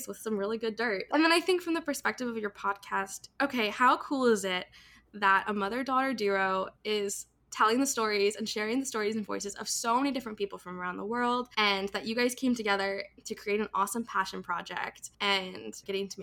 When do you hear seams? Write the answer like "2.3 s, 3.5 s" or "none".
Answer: 1.1 s, 11.5 s, 15.0 s